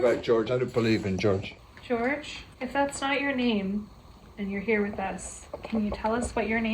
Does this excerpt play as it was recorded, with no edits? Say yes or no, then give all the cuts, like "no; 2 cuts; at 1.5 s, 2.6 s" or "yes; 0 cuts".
no; 2 cuts; at 1.5 s, 2.4 s